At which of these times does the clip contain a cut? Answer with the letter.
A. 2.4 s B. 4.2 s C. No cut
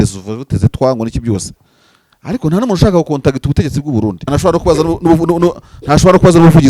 B